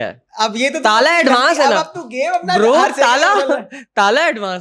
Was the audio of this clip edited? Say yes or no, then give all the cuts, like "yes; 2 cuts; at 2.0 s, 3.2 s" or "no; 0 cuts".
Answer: no; 0 cuts